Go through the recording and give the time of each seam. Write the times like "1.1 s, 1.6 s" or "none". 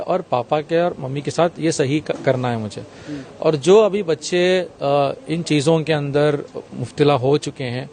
none